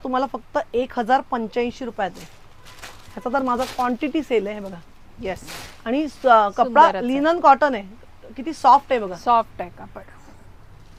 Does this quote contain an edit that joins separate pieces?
no; 0 cuts

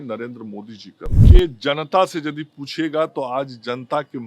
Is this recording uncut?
no; 1 cut; at 1.2 s

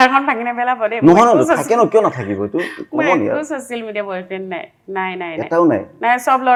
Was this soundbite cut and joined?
no; 0 cuts

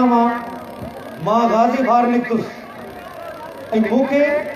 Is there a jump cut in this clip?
no; 0 cuts

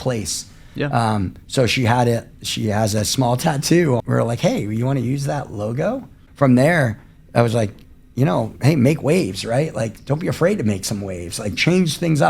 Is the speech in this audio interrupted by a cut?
yes; 2 cuts; at 4.0 s, 6.2 s

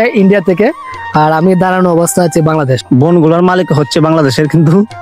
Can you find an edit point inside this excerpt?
yes; 1 cut; at 2.8 s

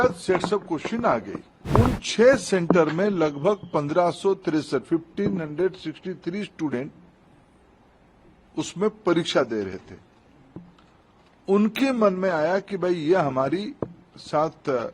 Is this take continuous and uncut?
no; 1 cut; at 1.5 s

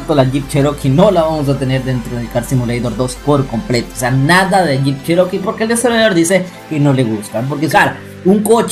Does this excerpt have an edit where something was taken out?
yes; 1 cut; at 7.7 s

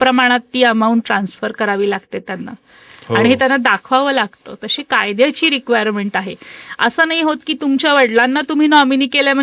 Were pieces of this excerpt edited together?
no; 0 cuts

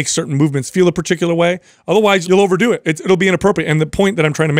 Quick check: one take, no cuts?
no; 1 cut; at 2.2 s

